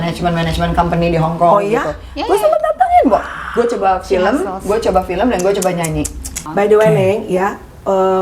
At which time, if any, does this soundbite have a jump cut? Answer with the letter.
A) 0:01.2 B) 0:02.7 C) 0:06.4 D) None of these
C